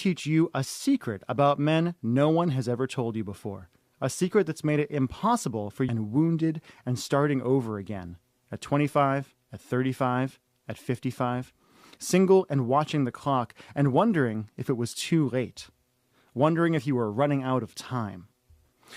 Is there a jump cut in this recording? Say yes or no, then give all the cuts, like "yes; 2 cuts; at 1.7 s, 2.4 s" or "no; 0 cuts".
no; 0 cuts